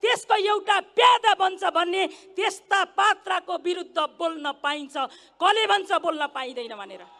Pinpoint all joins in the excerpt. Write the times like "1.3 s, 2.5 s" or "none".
none